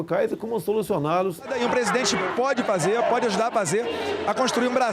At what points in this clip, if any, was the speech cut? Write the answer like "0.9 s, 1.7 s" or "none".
1.5 s